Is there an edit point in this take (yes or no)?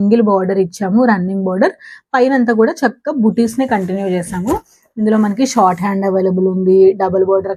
no